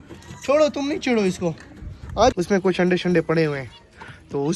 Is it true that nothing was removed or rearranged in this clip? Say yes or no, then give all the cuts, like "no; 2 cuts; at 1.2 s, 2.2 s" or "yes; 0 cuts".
no; 1 cut; at 2.3 s